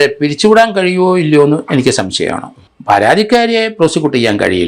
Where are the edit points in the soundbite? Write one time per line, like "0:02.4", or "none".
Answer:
0:02.7